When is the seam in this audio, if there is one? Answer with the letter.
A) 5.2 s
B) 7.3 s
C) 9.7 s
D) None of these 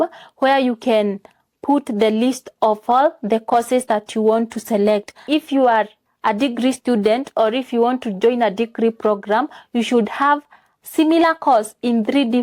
A